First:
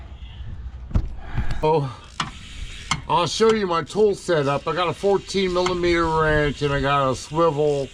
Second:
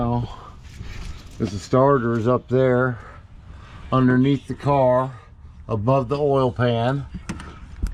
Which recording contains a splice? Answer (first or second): first